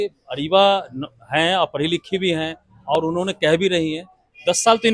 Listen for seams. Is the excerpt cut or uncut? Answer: uncut